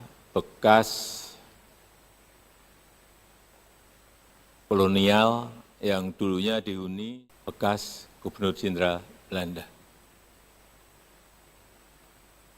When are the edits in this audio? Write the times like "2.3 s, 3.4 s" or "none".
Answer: 7.0 s